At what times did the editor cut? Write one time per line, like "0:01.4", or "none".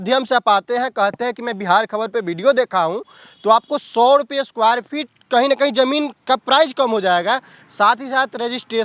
none